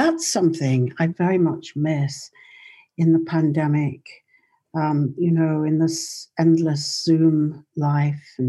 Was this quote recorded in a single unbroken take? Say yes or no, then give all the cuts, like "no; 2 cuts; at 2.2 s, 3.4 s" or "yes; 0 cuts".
no; 1 cut; at 1.1 s